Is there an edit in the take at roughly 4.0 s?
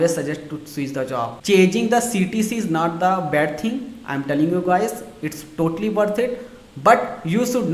no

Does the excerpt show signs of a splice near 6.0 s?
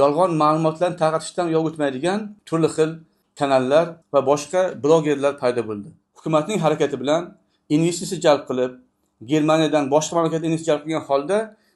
yes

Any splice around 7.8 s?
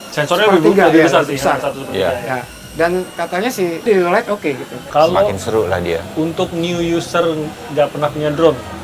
no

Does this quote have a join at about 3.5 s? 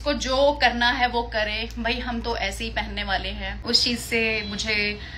yes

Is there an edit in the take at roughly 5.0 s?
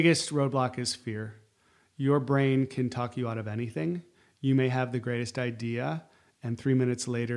no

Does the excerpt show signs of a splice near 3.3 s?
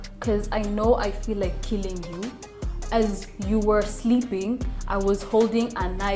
no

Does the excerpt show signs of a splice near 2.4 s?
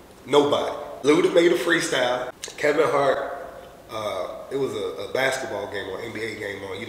yes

